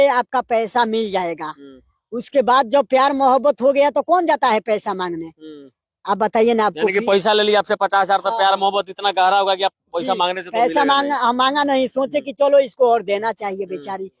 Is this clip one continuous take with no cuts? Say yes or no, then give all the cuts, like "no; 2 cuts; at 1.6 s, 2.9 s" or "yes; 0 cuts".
yes; 0 cuts